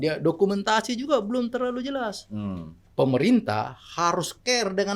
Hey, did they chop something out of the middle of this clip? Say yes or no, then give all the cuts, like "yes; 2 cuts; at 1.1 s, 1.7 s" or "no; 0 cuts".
yes; 1 cut; at 2.8 s